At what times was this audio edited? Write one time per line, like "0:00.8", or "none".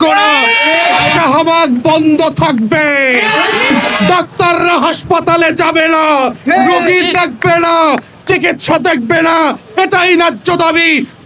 0:01.1
0:03.9